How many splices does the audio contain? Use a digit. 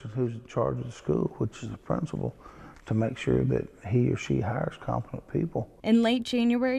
0